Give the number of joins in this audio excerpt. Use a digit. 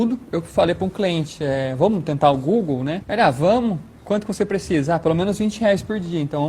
1